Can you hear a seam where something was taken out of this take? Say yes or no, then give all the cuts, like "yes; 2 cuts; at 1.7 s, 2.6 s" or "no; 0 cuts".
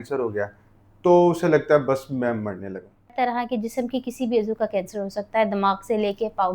yes; 1 cut; at 3.1 s